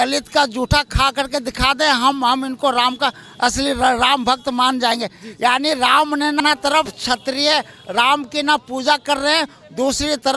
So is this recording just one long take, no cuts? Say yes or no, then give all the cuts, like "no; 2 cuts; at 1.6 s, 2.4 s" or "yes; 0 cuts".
no; 1 cut; at 6.4 s